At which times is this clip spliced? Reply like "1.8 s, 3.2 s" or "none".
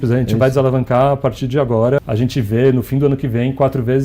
2.0 s